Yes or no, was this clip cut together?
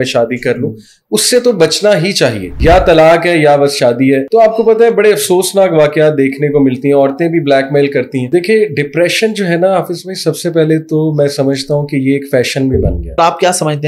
yes